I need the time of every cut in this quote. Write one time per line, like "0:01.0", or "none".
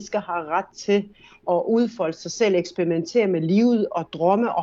0:01.4